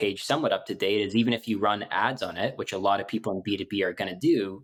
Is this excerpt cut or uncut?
uncut